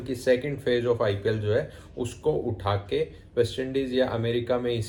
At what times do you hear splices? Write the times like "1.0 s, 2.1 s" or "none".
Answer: none